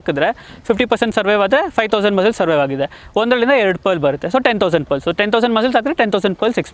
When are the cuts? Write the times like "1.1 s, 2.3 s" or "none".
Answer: none

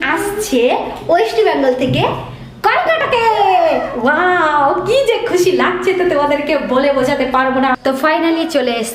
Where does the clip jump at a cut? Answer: 7.8 s

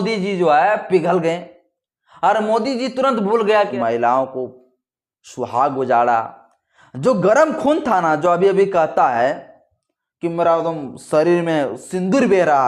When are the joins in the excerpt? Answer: 3.7 s

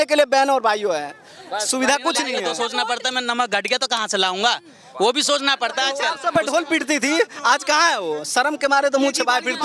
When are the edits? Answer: 2.5 s, 6.1 s

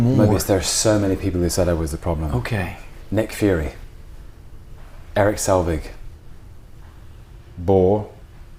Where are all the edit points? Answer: none

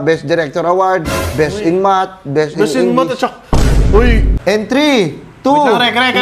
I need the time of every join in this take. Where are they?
4.3 s

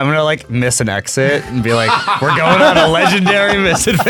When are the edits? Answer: none

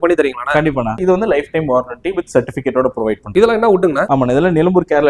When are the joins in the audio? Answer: 1.0 s, 3.2 s, 4.0 s

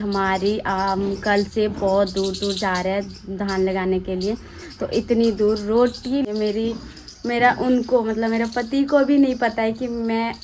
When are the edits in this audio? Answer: 6.3 s

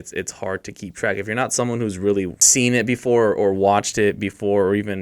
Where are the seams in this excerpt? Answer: 2.4 s

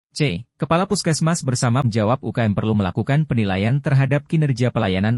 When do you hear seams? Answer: 1.9 s

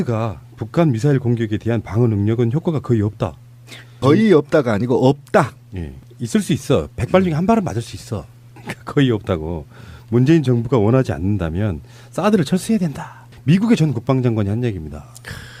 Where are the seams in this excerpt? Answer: 2.6 s

